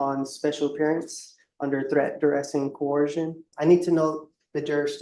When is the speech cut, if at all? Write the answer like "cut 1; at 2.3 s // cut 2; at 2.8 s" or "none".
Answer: cut 1; at 3.5 s